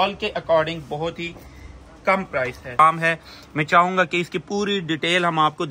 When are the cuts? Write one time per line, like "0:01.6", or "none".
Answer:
0:02.8